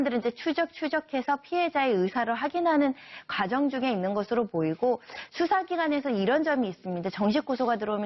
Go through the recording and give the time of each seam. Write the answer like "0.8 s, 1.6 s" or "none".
1.2 s